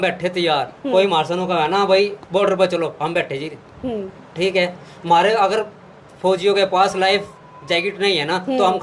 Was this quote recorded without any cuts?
yes; 0 cuts

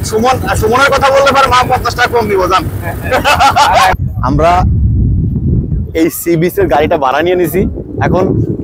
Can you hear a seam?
yes; 1 cut; at 4.0 s

